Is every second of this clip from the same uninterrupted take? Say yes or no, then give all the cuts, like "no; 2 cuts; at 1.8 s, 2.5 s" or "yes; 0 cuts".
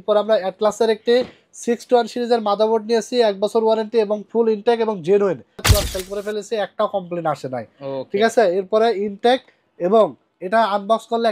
no; 1 cut; at 5.7 s